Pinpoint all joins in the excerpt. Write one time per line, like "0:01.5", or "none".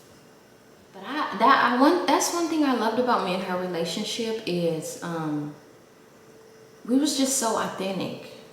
0:01.1